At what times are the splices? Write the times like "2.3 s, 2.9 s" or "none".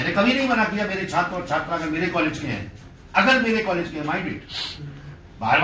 none